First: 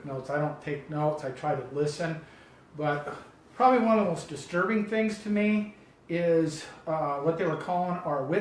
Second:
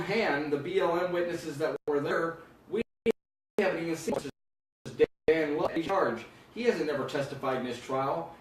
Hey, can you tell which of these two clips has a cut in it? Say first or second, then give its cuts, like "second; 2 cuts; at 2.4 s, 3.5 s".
first; 1 cut; at 2.3 s